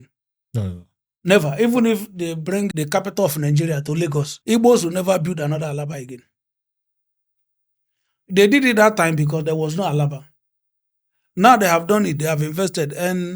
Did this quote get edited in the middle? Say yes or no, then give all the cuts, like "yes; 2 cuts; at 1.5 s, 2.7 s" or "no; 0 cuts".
yes; 2 cuts; at 2.7 s, 4.3 s